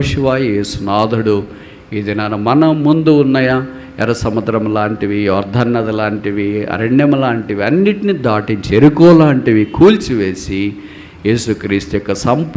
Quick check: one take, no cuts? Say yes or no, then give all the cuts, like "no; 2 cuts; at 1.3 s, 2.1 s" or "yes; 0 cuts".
yes; 0 cuts